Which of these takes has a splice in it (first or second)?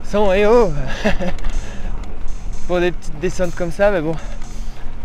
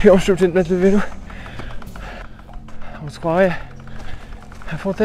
second